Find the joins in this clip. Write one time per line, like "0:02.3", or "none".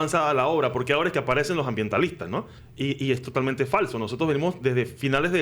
0:02.6